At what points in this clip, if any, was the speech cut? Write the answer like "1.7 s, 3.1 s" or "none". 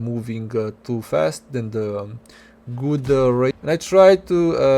3.6 s